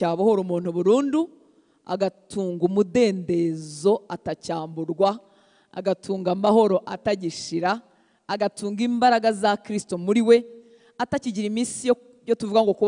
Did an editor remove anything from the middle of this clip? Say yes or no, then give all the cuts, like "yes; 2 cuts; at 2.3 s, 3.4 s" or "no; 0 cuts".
no; 0 cuts